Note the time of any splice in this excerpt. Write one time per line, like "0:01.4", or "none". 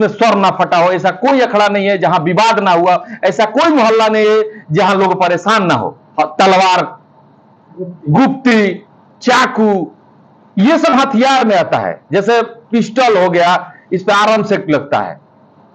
0:06.0